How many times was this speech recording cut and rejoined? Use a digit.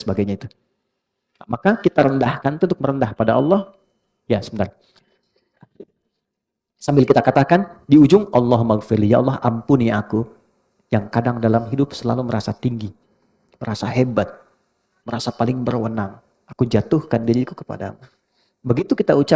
0